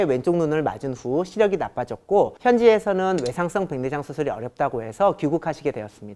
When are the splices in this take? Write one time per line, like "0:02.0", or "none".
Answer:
none